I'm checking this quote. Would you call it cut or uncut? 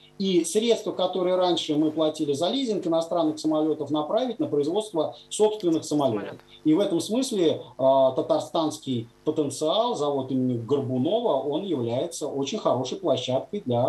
uncut